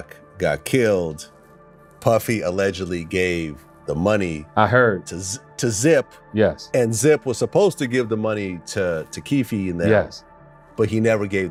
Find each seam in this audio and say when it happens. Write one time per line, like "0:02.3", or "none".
none

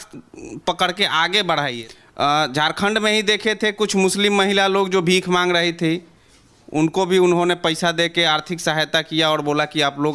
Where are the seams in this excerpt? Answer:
0:01.7

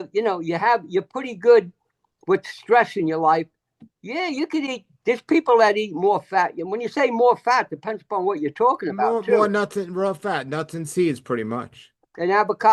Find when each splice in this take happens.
none

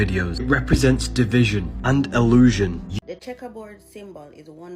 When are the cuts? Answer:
0:02.8

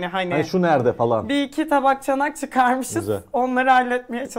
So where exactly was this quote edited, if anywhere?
none

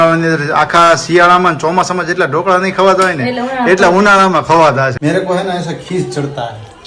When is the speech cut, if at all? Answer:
0:05.0

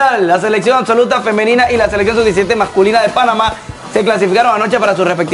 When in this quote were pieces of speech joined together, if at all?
none

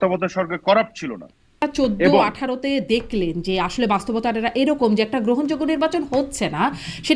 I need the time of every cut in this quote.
0:01.6

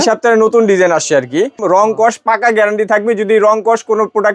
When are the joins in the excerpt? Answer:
0:01.6

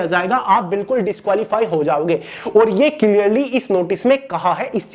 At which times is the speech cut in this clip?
none

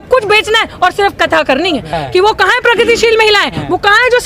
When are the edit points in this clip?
0:01.9

